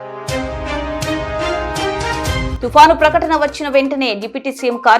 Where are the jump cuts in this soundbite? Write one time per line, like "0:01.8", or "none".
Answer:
0:02.5

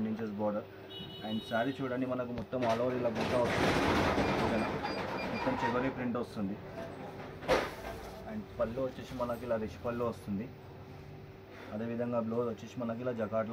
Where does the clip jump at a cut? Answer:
none

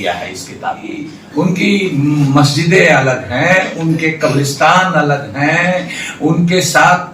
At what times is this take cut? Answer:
0:01.2

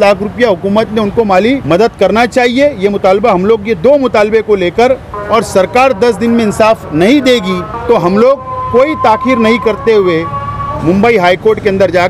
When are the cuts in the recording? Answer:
0:01.6
0:05.1
0:07.7

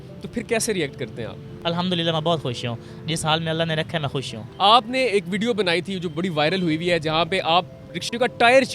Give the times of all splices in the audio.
0:01.5
0:04.4

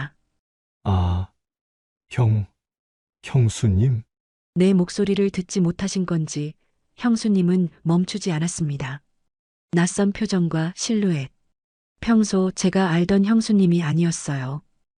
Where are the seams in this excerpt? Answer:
none

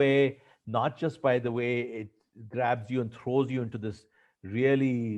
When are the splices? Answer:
none

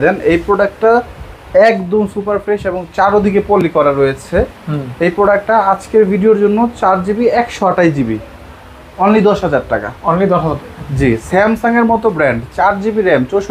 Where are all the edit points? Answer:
none

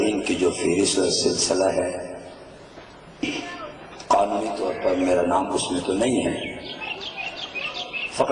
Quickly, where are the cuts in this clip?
0:04.3

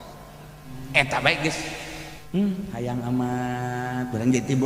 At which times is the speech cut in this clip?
0:02.1

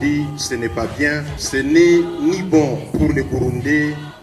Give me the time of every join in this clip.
0:01.3

